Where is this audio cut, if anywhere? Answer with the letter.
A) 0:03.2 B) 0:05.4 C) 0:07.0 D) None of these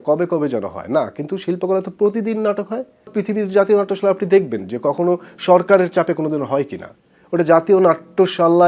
A